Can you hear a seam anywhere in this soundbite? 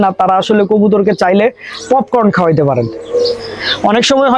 no; 0 cuts

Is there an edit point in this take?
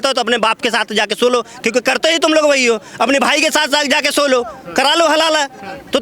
no; 0 cuts

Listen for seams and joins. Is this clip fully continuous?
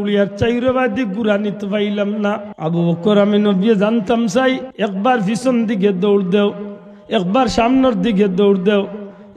no; 2 cuts; at 2.5 s, 4.7 s

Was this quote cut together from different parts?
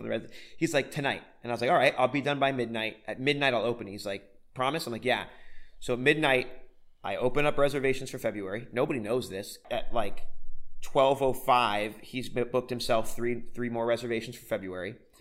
yes; 1 cut; at 9.6 s

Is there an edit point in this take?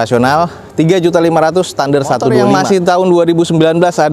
yes; 1 cut; at 2.5 s

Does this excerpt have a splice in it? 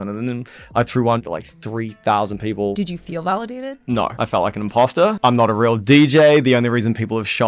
yes; 4 cuts; at 1.2 s, 2.8 s, 4.1 s, 5.2 s

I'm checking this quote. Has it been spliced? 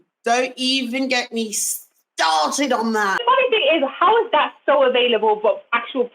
yes; 1 cut; at 3.2 s

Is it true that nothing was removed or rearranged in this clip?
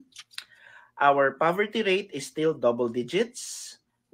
yes; 0 cuts

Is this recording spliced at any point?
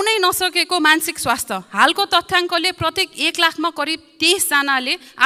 no; 0 cuts

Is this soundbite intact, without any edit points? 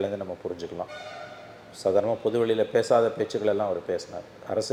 yes; 0 cuts

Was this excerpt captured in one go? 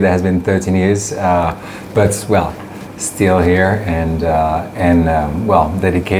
yes; 0 cuts

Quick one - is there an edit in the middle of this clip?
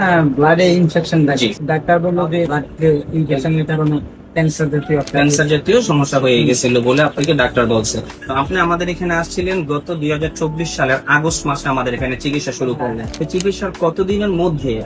yes; 4 cuts; at 1.6 s, 2.6 s, 8.2 s, 13.1 s

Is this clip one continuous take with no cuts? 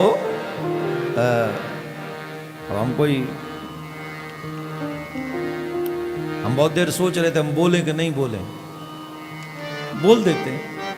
yes; 0 cuts

